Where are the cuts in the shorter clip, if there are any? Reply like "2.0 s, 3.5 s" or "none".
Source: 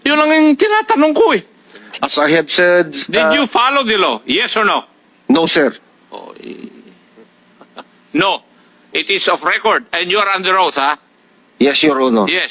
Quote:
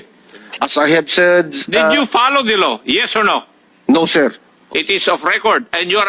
4.5 s